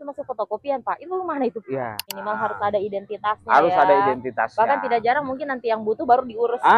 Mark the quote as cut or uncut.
cut